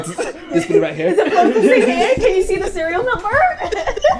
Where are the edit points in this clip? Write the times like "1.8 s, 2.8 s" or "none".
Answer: none